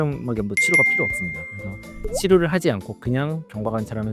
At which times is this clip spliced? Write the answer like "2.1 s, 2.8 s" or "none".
none